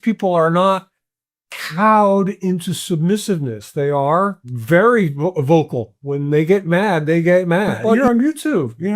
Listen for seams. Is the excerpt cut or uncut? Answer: cut